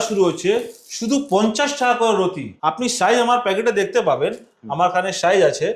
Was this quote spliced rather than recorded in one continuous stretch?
yes; 1 cut; at 2.5 s

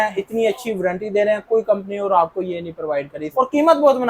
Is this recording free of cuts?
no; 1 cut; at 3.2 s

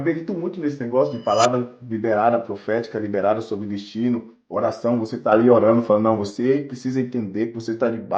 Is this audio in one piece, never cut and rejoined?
yes; 0 cuts

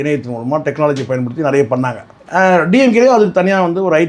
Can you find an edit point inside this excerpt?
no; 0 cuts

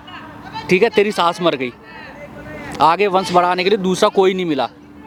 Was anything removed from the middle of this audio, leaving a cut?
no; 0 cuts

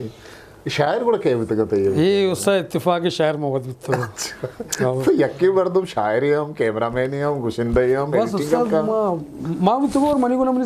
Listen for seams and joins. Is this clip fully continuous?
yes; 0 cuts

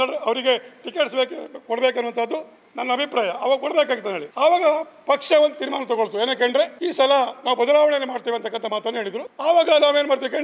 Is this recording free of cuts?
no; 3 cuts; at 4.2 s, 6.8 s, 9.2 s

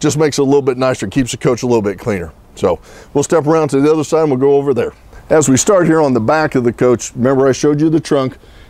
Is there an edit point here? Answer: yes; 1 cut; at 2.6 s

